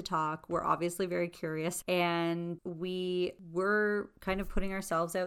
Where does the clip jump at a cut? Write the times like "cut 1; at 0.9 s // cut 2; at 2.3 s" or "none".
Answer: cut 1; at 1.8 s // cut 2; at 2.6 s // cut 3; at 3.4 s

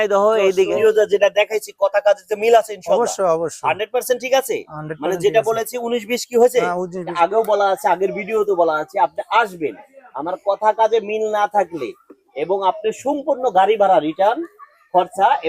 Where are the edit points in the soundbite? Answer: cut 1; at 0.8 s // cut 2; at 7.0 s

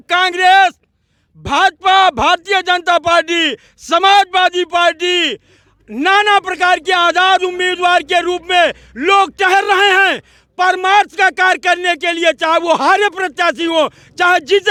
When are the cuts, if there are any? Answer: none

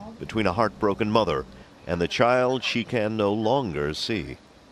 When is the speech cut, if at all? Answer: cut 1; at 2.2 s

